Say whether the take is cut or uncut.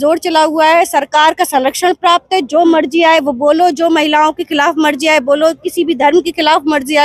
uncut